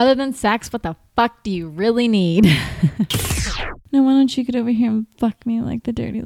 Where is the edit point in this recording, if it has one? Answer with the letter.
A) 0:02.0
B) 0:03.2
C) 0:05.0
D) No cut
B